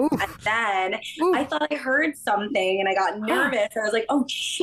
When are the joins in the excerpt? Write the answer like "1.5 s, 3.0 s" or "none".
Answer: none